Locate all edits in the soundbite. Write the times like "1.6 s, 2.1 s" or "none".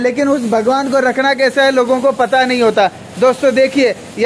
none

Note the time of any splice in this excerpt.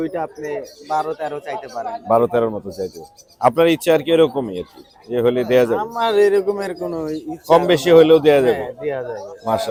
none

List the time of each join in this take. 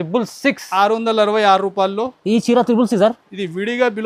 none

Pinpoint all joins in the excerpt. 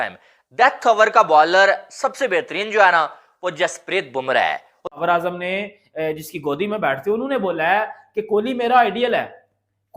5.0 s

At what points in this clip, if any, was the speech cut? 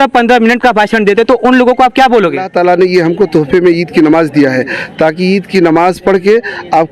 2.5 s

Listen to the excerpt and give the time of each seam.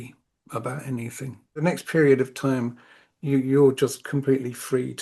1.6 s

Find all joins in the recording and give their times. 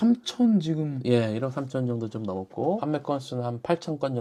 none

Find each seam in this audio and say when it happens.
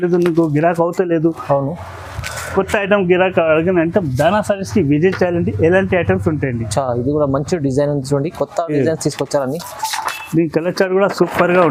none

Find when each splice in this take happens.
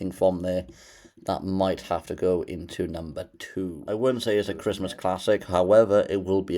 3.8 s

